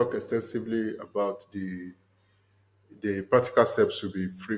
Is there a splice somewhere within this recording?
no; 0 cuts

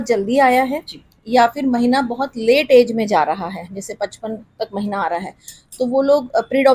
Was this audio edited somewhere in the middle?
no; 0 cuts

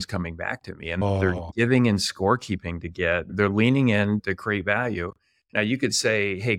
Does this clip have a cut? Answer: yes; 3 cuts; at 1.0 s, 3.3 s, 4.2 s

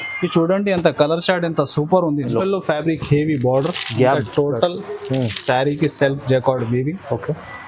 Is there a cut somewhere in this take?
yes; 1 cut; at 2.3 s

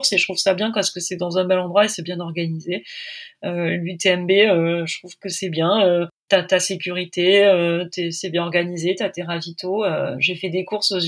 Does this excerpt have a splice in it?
no; 0 cuts

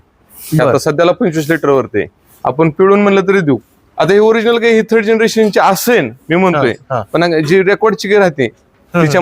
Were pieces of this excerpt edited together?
yes; 1 cut; at 3.8 s

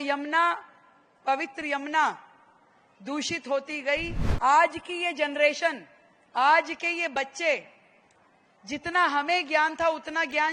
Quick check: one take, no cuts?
no; 1 cut; at 4.2 s

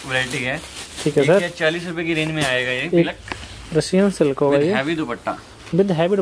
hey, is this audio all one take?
no; 1 cut; at 3.1 s

